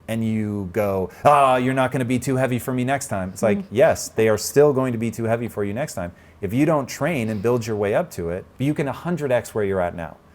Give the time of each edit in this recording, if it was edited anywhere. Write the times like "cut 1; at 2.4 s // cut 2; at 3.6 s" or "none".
cut 1; at 8.5 s